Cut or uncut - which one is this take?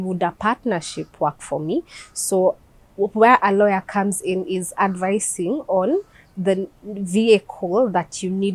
uncut